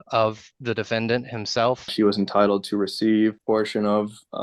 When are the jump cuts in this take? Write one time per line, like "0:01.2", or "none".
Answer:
0:01.9
0:03.4